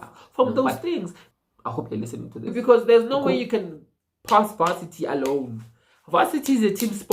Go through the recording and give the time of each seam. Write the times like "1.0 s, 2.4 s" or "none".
1.2 s, 2.5 s